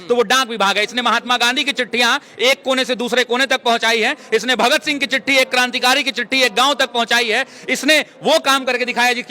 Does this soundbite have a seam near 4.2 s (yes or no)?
no